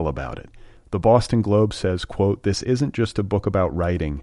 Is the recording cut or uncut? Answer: uncut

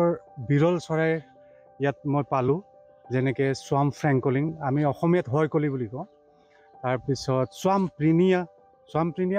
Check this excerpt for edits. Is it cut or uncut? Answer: uncut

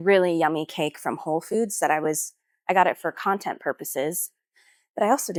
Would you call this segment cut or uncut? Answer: uncut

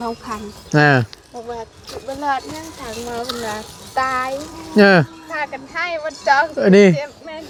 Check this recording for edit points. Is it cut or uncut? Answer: uncut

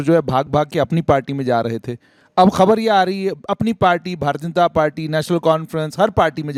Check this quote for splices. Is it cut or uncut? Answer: uncut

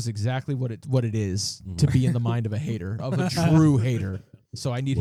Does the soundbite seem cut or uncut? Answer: uncut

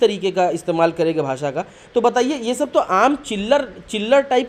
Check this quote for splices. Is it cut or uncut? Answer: uncut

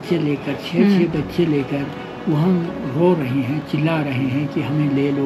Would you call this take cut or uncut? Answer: uncut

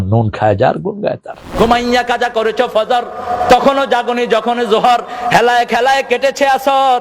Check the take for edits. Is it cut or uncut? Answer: cut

